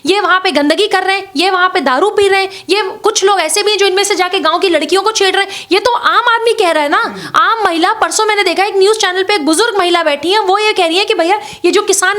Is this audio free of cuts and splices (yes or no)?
yes